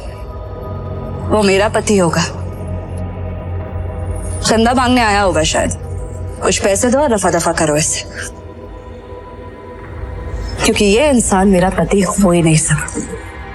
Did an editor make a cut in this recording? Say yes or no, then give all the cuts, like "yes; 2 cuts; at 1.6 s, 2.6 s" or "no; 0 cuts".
no; 0 cuts